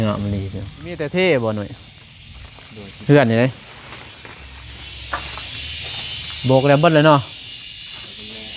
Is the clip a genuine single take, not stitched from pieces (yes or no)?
no